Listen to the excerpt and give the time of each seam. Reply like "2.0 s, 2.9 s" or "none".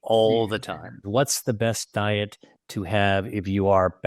1.0 s